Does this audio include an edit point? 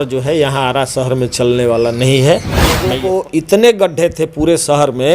yes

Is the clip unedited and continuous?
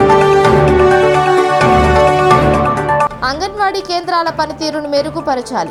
yes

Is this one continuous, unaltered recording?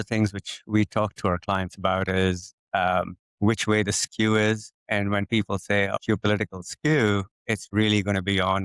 no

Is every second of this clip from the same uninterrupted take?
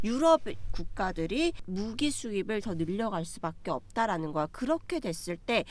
no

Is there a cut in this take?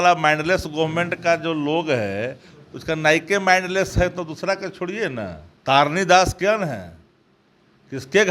yes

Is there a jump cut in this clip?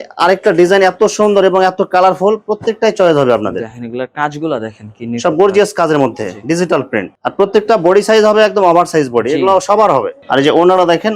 no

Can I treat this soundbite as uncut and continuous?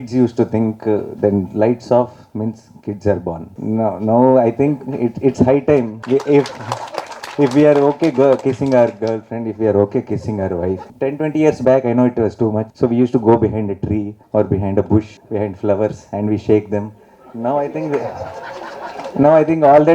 no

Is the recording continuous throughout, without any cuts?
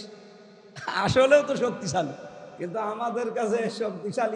yes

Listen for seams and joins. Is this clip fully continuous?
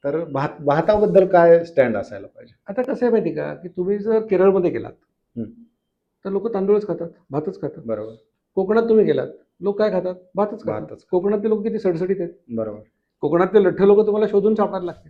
yes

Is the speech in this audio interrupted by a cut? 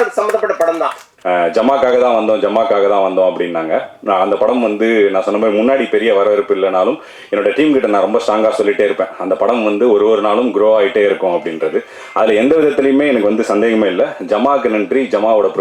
yes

